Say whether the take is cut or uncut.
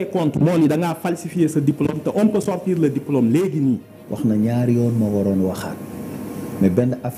cut